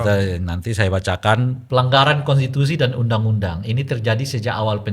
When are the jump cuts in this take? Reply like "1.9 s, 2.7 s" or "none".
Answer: 1.6 s